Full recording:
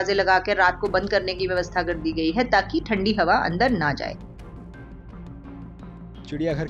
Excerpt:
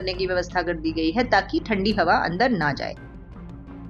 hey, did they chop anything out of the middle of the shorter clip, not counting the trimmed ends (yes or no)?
yes